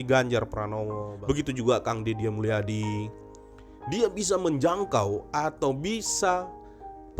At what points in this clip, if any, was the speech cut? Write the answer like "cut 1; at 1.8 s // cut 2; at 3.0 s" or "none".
cut 1; at 1.1 s